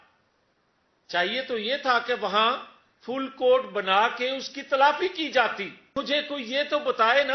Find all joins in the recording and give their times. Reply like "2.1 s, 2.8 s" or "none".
5.9 s